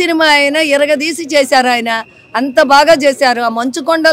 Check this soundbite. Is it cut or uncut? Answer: uncut